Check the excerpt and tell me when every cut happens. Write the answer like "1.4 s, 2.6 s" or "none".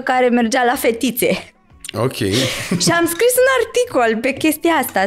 none